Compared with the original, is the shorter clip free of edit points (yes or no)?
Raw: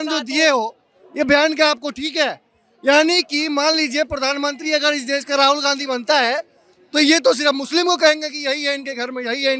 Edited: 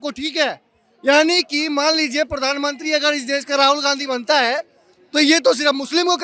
yes